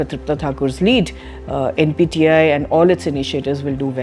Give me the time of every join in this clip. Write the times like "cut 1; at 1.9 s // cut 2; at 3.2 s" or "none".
none